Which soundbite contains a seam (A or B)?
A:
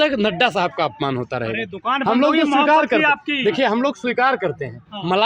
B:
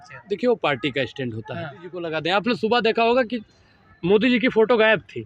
B